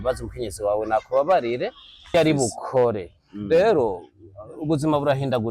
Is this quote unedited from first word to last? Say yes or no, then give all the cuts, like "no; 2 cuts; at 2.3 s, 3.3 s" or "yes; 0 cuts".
no; 1 cut; at 2.1 s